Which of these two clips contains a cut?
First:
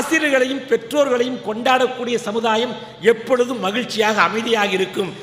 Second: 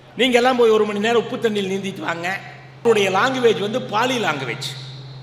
second; 1 cut; at 2.8 s

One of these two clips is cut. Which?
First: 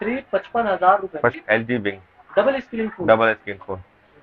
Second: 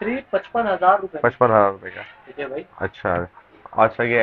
first; 1 cut; at 1.3 s

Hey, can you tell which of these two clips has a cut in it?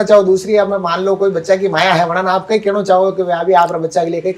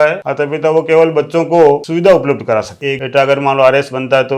second; 1 cut; at 2.8 s

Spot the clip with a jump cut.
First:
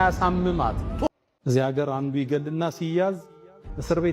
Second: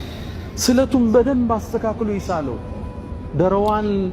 first; 1 cut; at 0.9 s

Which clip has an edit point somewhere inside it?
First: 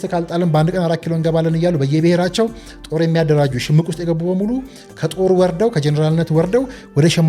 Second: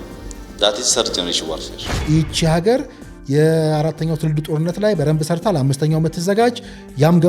second; 1 cut; at 1.9 s

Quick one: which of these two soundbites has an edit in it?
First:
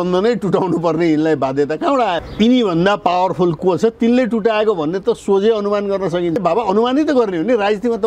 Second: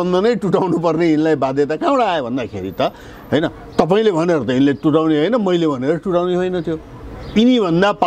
first; 2 cuts; at 2.2 s, 6.4 s

